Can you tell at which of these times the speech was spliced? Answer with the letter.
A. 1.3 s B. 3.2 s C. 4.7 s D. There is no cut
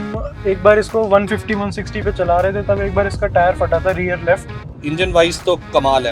C